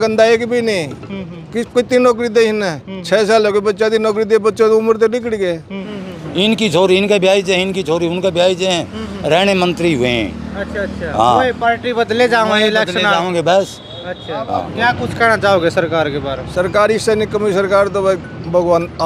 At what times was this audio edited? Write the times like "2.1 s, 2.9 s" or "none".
5.8 s, 14.7 s